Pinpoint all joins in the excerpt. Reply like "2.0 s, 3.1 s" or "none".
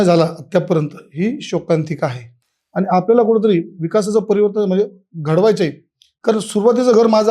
none

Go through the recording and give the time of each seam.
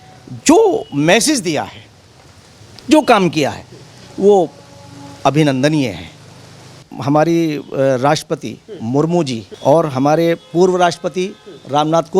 6.9 s, 9.4 s

